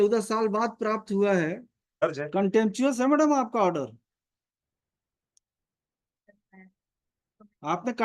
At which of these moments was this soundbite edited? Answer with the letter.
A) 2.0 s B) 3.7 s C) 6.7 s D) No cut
A